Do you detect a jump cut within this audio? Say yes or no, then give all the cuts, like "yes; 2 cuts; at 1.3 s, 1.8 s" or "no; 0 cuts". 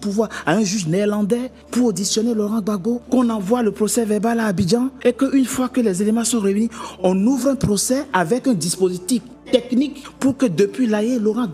yes; 4 cuts; at 1.6 s, 3.0 s, 5.0 s, 9.8 s